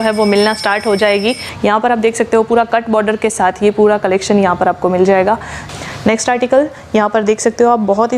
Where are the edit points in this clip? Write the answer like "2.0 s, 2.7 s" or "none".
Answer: 1.5 s, 5.7 s